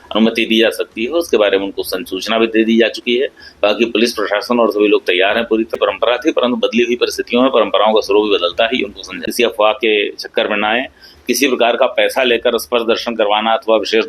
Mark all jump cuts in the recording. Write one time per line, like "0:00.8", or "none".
0:05.8
0:09.2